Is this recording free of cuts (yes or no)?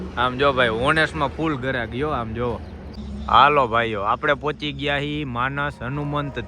no